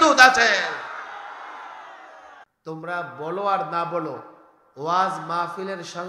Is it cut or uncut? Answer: cut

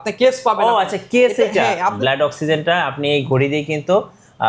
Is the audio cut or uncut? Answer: cut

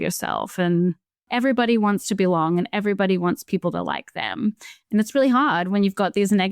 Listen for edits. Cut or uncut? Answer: cut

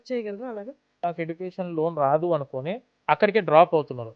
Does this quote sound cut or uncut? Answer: cut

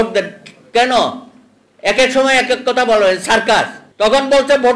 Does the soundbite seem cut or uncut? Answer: cut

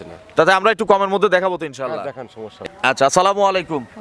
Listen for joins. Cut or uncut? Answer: cut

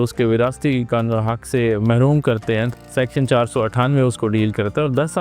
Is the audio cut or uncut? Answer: cut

